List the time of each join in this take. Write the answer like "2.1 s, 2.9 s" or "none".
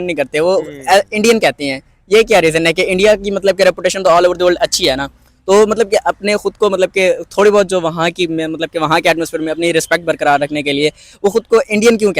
2.2 s